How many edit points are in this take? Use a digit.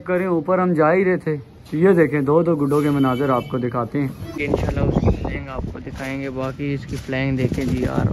1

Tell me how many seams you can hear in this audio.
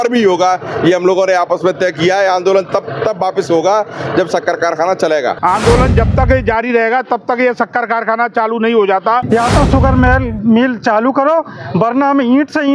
2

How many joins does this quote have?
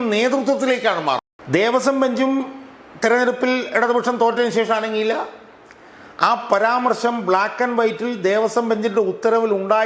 1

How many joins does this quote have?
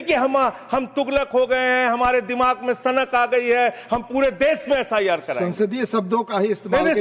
0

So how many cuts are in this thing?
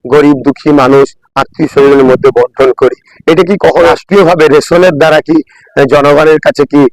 1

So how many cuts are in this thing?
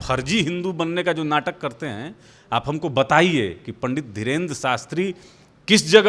0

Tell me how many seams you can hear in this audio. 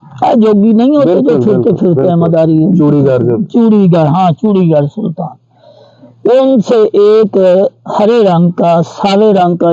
0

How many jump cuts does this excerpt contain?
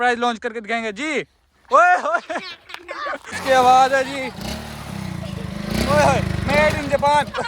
1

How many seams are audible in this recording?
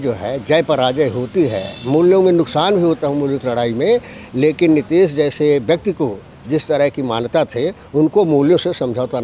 0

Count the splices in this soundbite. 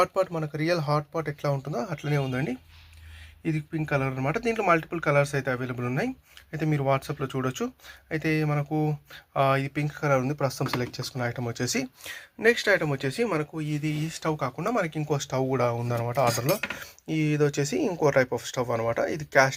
0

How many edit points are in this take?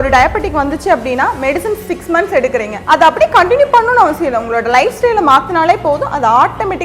1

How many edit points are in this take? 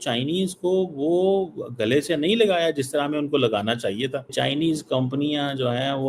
1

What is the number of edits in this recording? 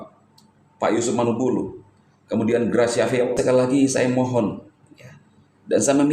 1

